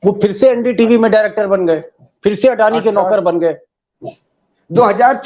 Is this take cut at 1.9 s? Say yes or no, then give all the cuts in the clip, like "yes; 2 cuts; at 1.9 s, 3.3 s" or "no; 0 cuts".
no; 1 cut; at 4.3 s